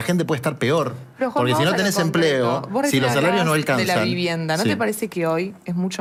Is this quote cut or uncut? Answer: uncut